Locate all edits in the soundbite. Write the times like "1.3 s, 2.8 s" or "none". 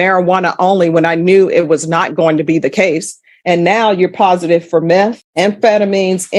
none